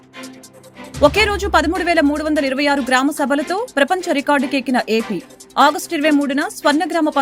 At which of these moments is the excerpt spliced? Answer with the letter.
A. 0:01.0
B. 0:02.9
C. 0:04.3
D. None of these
A